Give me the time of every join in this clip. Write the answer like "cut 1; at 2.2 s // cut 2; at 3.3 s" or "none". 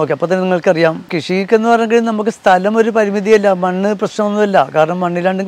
cut 1; at 1.1 s